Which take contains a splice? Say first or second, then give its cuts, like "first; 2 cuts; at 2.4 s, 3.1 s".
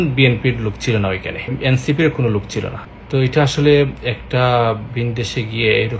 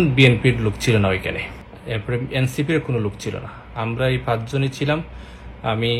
first; 2 cuts; at 1.5 s, 2.9 s